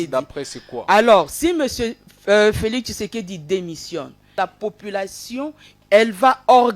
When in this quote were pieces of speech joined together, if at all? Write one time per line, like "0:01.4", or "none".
0:04.4
0:05.7